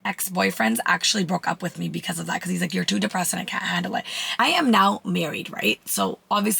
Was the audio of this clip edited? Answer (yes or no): yes